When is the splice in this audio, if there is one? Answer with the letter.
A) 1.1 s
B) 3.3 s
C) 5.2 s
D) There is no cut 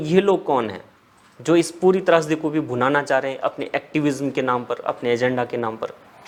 D